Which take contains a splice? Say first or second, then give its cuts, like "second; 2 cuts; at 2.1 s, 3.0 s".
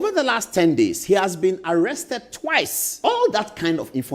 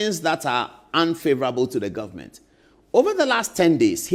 first; 1 cut; at 3.0 s